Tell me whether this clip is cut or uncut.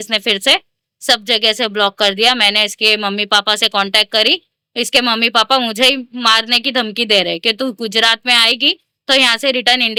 uncut